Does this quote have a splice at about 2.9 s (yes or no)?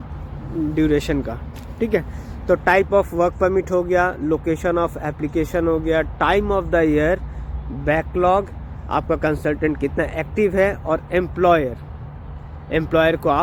no